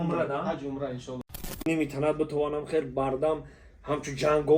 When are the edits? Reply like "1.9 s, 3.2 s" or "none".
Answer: 1.7 s